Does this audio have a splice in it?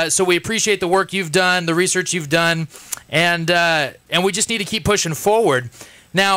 yes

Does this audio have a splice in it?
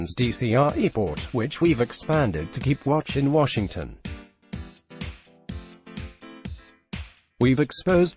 yes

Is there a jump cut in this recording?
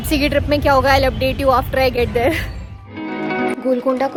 no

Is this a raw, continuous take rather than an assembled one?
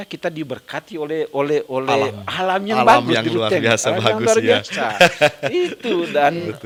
yes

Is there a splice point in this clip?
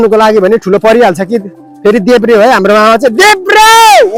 no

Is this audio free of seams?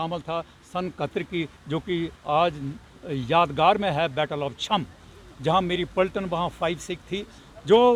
yes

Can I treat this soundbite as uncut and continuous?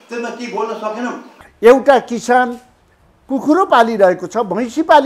no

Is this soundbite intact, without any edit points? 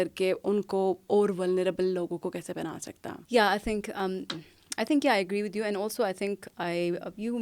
yes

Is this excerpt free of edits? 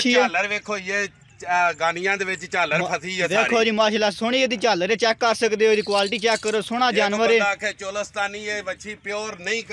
yes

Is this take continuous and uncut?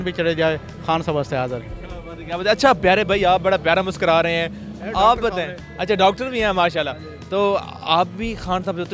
yes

